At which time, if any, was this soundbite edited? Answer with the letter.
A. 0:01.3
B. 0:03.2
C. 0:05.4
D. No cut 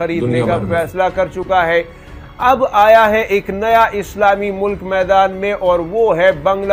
D